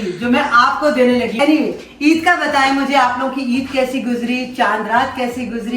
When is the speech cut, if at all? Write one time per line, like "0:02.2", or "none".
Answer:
0:01.4

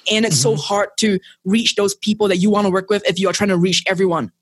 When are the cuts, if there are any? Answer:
none

